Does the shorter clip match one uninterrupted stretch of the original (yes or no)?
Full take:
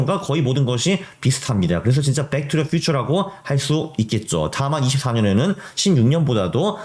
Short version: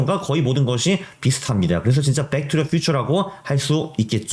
yes